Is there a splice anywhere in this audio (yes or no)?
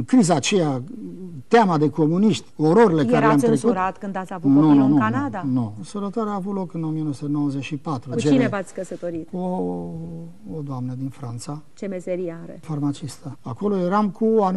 yes